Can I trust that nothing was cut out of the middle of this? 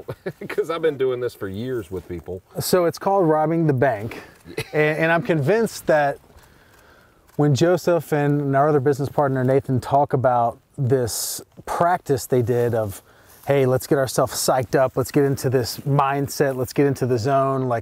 yes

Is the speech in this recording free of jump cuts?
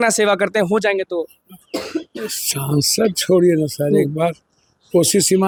yes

